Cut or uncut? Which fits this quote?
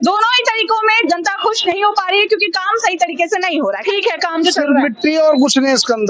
cut